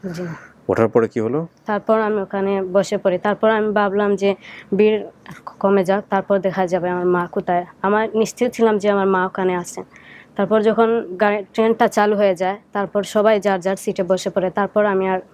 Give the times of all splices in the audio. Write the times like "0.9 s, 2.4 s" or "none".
none